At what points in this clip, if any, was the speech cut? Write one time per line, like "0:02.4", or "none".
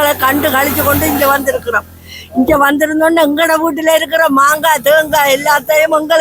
none